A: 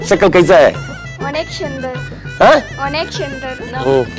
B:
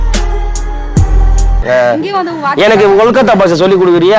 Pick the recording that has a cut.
B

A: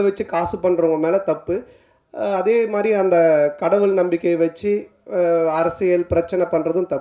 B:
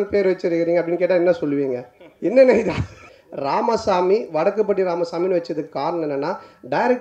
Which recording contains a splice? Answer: B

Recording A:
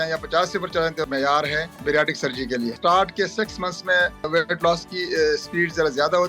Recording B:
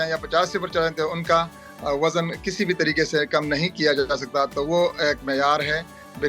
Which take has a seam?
A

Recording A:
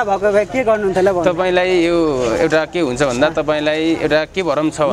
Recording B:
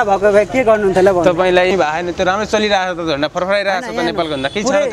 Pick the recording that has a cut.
B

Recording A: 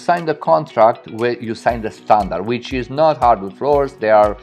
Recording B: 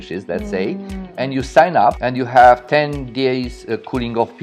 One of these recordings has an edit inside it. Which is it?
B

